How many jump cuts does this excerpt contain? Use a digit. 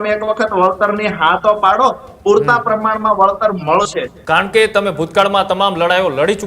1